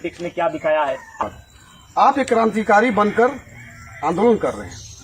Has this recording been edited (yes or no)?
yes